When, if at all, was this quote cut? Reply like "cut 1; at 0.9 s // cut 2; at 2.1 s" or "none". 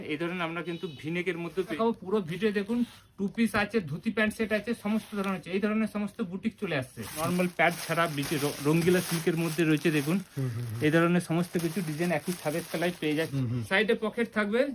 cut 1; at 1.8 s // cut 2; at 7.2 s // cut 3; at 13.3 s